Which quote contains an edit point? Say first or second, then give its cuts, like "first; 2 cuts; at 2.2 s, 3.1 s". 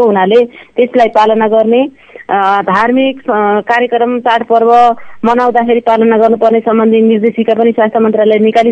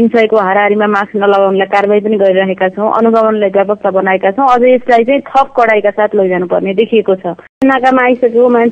second; 1 cut; at 7.6 s